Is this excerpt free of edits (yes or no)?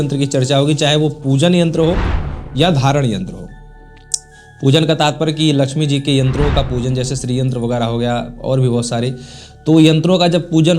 yes